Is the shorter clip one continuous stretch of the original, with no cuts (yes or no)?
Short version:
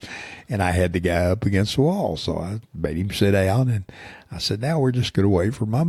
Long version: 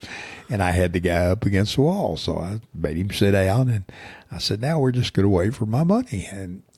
yes